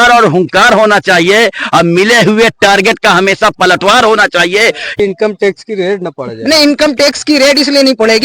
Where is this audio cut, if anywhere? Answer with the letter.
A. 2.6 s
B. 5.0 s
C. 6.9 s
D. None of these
B